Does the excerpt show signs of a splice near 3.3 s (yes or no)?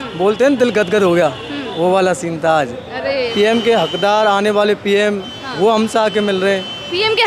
yes